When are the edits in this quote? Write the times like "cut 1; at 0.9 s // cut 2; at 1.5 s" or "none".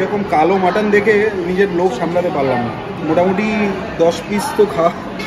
cut 1; at 3.0 s